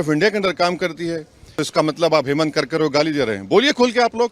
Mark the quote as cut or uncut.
cut